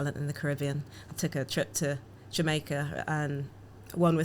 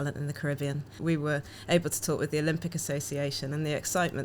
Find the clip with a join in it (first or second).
second